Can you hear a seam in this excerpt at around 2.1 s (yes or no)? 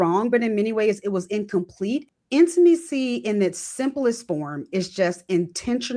yes